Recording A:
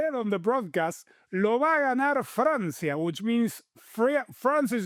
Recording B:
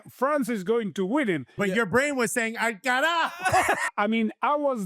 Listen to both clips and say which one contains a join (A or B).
B